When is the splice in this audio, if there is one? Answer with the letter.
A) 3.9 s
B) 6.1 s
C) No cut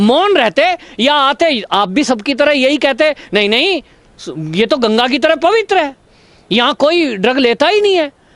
C